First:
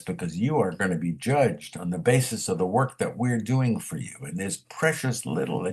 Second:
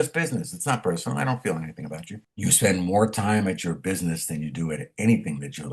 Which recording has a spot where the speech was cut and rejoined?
second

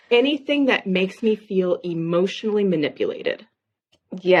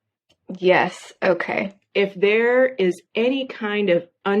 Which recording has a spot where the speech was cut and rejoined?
second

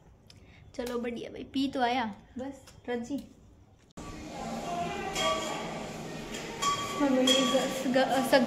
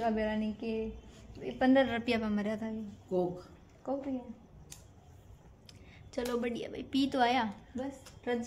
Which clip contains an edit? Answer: first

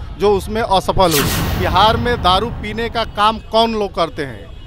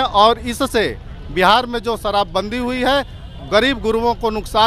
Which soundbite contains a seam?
first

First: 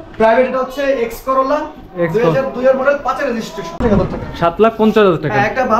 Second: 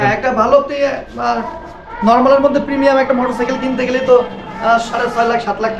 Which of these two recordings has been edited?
first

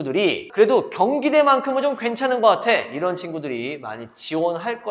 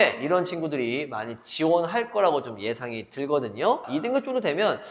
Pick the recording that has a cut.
second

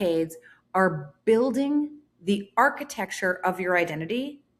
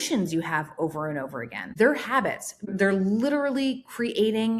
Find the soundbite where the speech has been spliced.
second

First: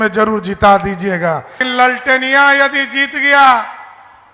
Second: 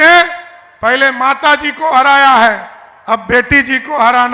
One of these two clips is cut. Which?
first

